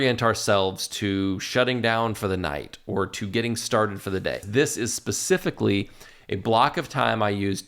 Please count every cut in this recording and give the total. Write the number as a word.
one